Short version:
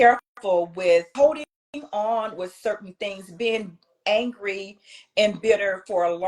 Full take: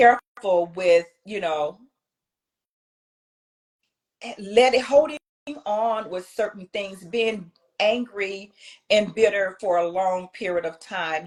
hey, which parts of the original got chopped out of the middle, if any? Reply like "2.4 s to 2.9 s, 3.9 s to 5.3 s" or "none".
1.1 s to 4.9 s